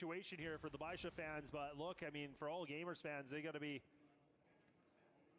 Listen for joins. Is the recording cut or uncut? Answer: cut